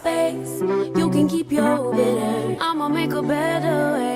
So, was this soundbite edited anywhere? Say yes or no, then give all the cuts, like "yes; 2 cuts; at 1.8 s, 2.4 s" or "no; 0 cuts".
no; 0 cuts